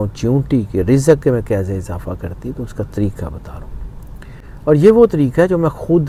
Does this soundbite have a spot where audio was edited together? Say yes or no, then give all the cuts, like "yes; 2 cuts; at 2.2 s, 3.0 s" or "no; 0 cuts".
no; 0 cuts